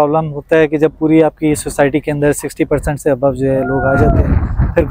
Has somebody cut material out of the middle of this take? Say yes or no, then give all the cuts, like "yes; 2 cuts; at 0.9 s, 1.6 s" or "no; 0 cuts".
no; 0 cuts